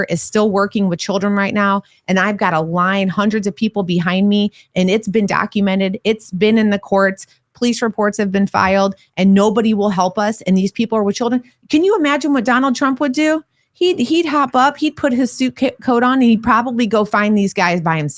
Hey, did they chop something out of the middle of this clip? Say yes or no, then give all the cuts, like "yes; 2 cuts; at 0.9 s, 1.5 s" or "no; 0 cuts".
no; 0 cuts